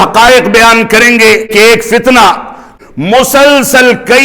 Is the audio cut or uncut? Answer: cut